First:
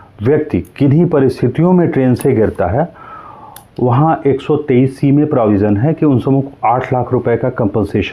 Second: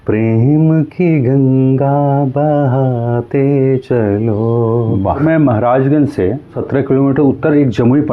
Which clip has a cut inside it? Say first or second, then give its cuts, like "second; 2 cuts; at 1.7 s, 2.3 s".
second; 2 cuts; at 5.2 s, 6.6 s